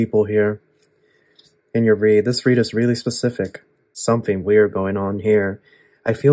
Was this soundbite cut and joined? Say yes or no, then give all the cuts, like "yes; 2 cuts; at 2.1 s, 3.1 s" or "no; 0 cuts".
yes; 1 cut; at 4.0 s